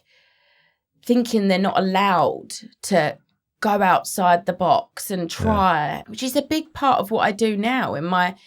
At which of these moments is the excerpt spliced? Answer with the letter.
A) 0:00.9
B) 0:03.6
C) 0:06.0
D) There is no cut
C